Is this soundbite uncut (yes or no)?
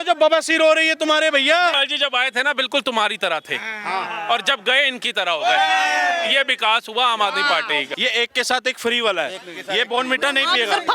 no